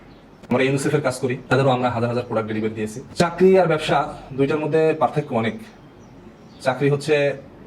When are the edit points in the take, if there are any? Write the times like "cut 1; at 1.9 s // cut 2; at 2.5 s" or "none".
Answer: cut 1; at 1.4 s // cut 2; at 3.0 s